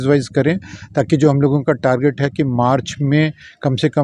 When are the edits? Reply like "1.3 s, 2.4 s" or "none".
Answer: none